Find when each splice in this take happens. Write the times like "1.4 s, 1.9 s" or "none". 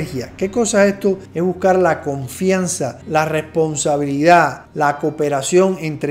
none

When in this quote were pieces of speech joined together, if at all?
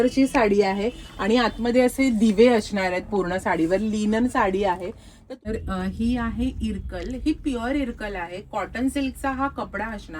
5.2 s

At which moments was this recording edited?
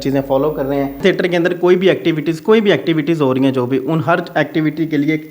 0.9 s

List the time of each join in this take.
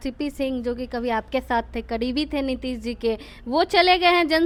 none

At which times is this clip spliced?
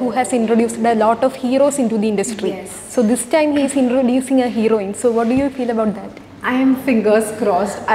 none

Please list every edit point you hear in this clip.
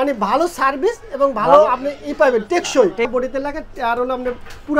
3.1 s

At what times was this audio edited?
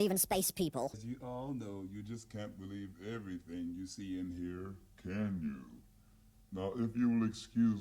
1.0 s

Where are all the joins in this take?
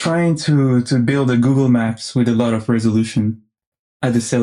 none

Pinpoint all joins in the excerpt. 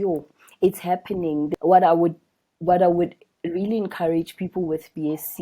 1.5 s

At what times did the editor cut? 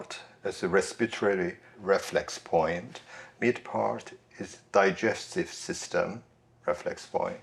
none

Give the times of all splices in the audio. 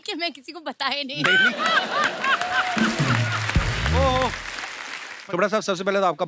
5.1 s

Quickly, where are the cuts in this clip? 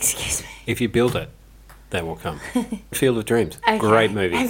3.0 s

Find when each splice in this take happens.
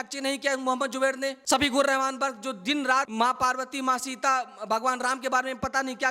1.4 s, 3.1 s

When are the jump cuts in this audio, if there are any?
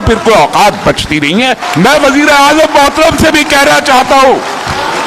1.6 s

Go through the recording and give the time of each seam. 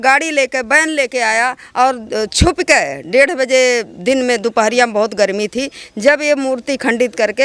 none

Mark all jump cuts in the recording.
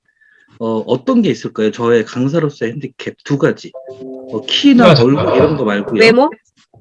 none

